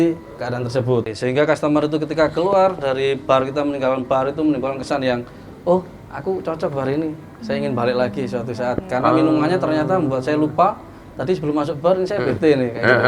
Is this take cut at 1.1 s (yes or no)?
yes